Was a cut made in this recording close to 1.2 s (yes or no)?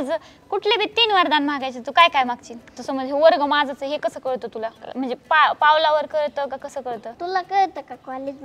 no